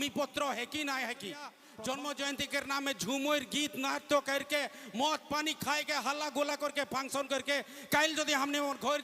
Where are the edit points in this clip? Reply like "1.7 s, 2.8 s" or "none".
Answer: 1.6 s